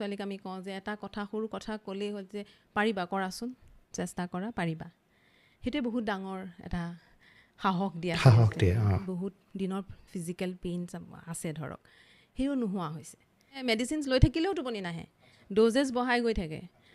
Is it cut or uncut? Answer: cut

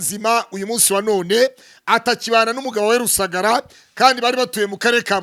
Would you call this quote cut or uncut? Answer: uncut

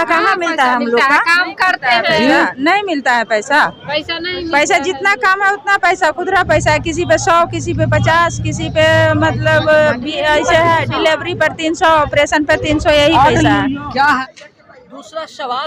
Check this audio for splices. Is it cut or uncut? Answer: cut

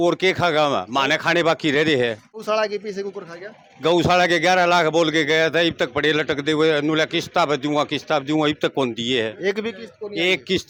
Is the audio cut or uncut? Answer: uncut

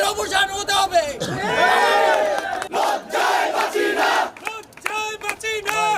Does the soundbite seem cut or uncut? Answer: uncut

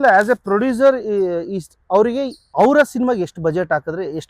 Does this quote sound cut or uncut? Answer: cut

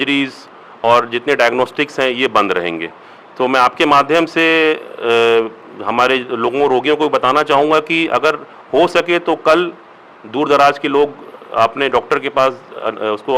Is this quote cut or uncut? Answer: uncut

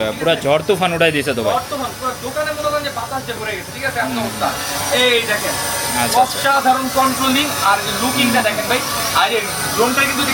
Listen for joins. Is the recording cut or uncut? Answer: uncut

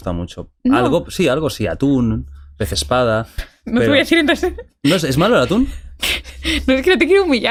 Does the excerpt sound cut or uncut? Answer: uncut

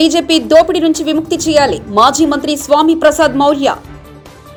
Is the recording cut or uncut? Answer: uncut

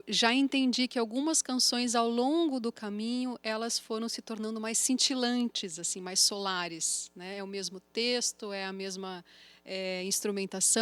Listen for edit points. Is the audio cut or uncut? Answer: uncut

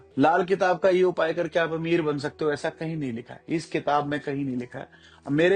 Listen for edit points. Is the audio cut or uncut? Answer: uncut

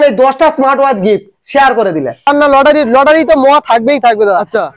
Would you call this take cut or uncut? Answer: cut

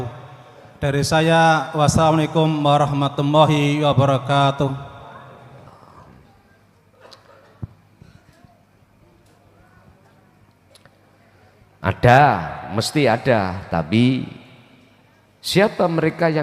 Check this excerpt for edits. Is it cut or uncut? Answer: cut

